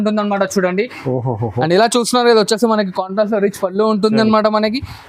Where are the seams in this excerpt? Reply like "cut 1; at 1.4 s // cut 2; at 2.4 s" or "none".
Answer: none